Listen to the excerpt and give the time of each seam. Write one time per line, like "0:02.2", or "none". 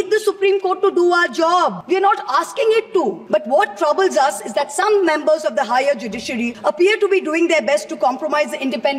0:01.8
0:03.2
0:06.5